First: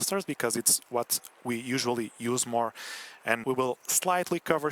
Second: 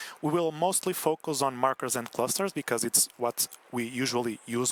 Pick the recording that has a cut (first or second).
first